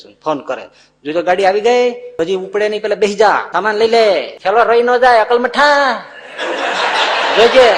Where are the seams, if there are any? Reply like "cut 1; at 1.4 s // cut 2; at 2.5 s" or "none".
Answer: cut 1; at 2.1 s // cut 2; at 3.5 s // cut 3; at 4.3 s